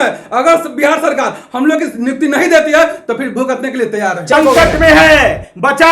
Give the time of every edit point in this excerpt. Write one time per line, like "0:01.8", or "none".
0:04.3